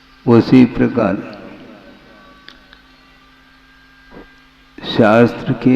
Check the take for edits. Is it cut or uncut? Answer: cut